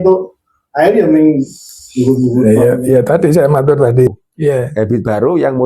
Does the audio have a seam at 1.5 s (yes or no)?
no